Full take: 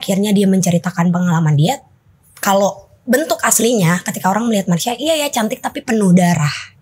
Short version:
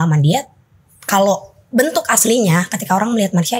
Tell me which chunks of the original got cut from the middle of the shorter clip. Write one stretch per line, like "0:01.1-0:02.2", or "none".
none